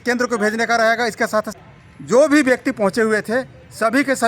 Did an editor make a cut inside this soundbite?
yes; 1 cut; at 1.5 s

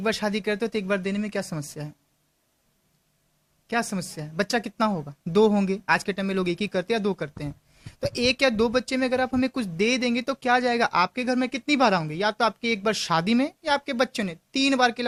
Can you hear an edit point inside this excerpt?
no; 0 cuts

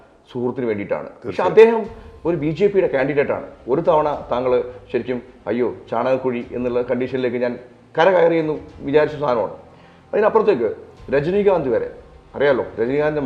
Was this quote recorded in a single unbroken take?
yes; 0 cuts

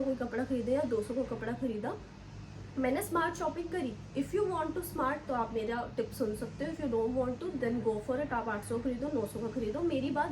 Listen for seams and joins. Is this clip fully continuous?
yes; 0 cuts

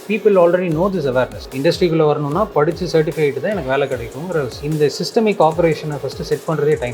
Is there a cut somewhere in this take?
yes; 2 cuts; at 1.4 s, 4.6 s

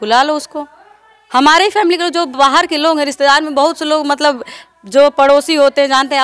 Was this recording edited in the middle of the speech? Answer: no; 0 cuts

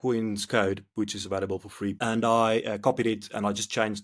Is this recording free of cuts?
no; 1 cut; at 2.0 s

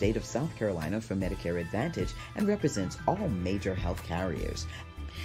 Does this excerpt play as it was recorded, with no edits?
yes; 0 cuts

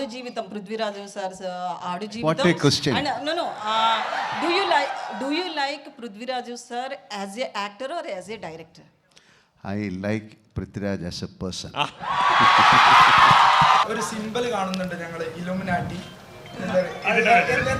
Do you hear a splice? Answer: yes; 1 cut; at 13.8 s

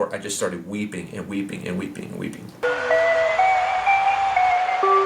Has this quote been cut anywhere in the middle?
yes; 1 cut; at 2.5 s

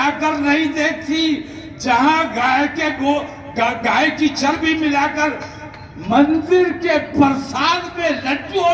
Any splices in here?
no; 0 cuts

